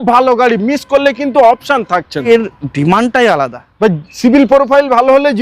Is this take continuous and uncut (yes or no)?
no